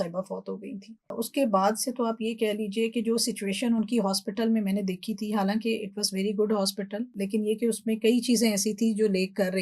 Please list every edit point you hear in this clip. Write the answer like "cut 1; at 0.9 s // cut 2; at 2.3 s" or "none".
cut 1; at 1.1 s // cut 2; at 7.1 s